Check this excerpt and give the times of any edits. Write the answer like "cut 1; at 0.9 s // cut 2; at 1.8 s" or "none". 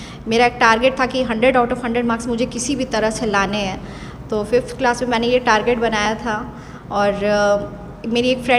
none